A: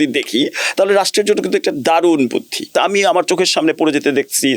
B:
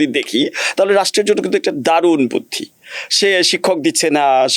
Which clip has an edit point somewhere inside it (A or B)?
A